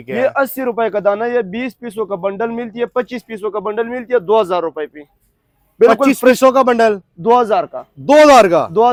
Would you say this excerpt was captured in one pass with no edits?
yes; 0 cuts

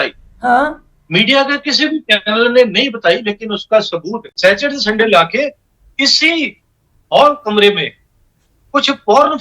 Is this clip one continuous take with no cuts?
no; 1 cut; at 4.2 s

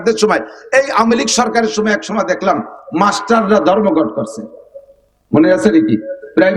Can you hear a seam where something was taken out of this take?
no; 0 cuts

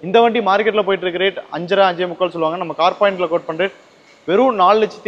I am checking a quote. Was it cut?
no; 0 cuts

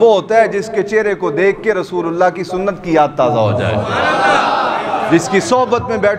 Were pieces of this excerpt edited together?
no; 0 cuts

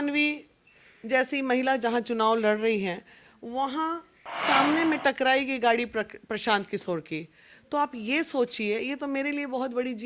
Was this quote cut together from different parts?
no; 0 cuts

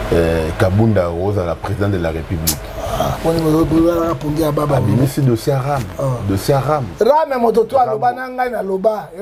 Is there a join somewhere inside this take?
no; 0 cuts

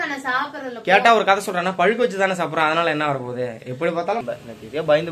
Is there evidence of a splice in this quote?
yes; 1 cut; at 4.2 s

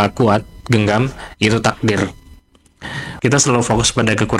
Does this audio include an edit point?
yes; 1 cut; at 3.0 s

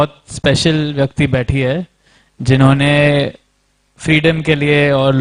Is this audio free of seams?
yes; 0 cuts

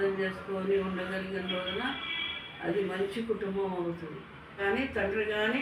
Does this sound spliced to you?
yes; 1 cut; at 4.6 s

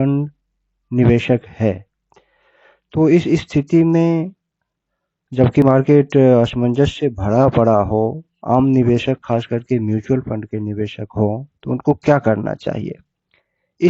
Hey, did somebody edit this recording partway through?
yes; 1 cut; at 11.0 s

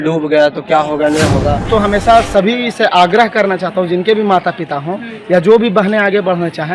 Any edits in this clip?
yes; 1 cut; at 1.7 s

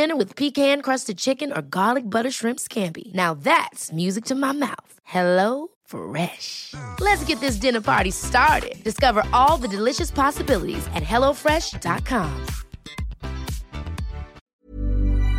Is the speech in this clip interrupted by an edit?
yes; 1 cut; at 14.4 s

